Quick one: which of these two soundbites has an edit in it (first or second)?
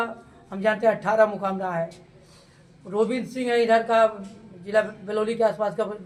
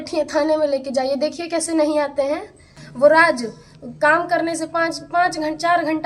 second